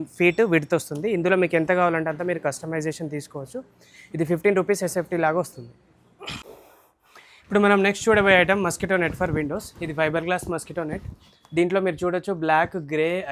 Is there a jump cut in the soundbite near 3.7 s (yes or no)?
no